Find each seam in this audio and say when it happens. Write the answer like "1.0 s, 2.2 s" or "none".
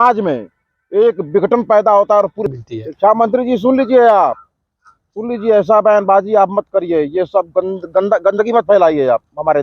2.4 s